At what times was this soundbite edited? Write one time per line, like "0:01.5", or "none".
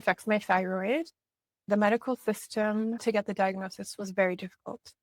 0:01.6
0:03.0